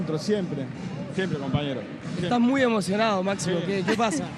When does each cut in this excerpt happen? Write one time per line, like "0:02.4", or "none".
none

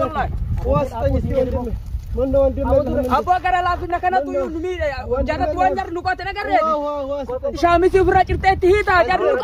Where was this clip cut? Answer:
0:07.6

